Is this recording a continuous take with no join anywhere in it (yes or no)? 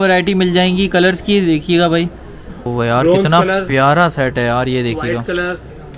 no